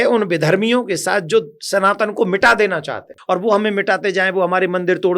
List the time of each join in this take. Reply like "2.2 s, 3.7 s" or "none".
3.1 s